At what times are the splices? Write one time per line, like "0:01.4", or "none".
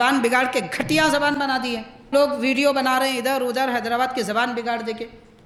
none